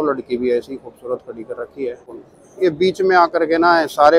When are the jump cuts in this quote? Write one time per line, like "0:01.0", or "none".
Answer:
0:02.1